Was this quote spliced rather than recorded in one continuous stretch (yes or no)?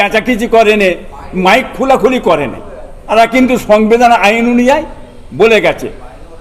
yes